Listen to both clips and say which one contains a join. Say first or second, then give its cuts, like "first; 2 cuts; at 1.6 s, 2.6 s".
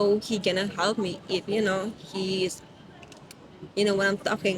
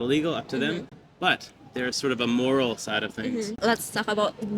second; 2 cuts; at 1.0 s, 3.5 s